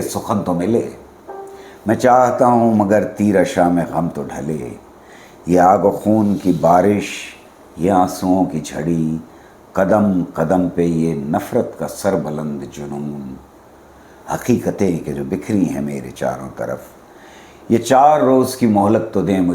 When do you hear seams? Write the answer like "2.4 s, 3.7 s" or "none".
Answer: none